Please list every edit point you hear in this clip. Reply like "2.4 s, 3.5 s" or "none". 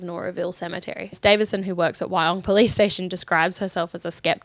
1.1 s